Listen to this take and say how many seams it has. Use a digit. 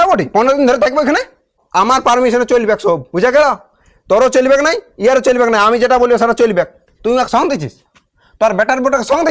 2